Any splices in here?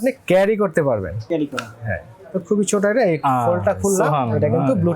yes; 1 cut; at 1.2 s

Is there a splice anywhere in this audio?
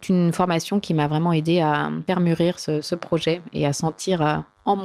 yes; 1 cut; at 2.0 s

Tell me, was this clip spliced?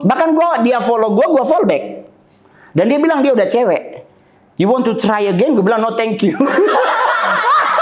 no; 0 cuts

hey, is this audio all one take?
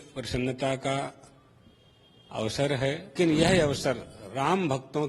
no; 1 cut; at 3.1 s

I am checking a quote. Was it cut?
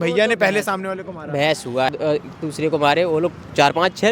yes; 1 cut; at 1.9 s

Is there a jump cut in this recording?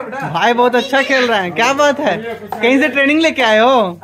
no; 0 cuts

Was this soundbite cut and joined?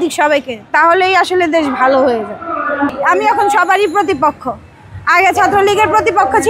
yes; 1 cut; at 2.9 s

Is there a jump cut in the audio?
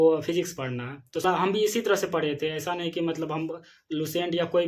yes; 1 cut; at 1.2 s

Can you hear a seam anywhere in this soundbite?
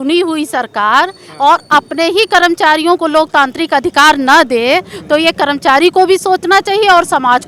no; 0 cuts

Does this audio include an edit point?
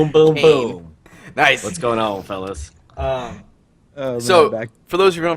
yes; 1 cut; at 1.4 s

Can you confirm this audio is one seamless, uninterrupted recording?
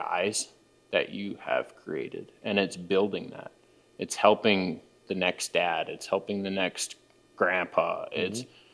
yes; 0 cuts

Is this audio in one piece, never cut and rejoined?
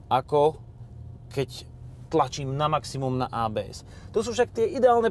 no; 1 cut; at 3.5 s

